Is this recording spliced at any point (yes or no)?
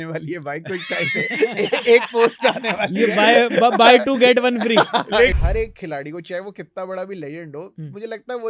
yes